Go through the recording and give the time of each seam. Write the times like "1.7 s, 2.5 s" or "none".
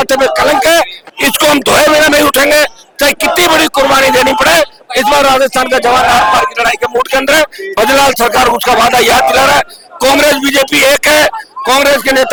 none